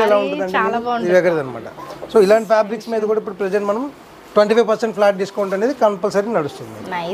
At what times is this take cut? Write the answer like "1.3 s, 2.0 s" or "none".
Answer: none